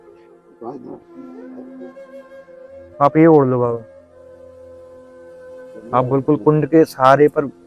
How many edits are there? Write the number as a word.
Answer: two